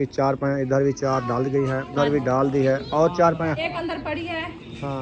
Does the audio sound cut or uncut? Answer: cut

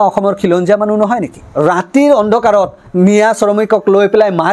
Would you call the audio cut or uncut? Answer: cut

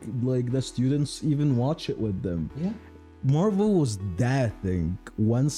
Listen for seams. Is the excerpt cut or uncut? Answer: uncut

